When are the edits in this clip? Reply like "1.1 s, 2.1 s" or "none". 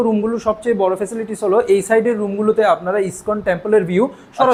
none